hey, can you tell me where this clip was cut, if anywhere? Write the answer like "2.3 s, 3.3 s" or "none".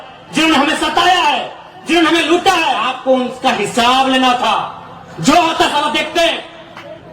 2.9 s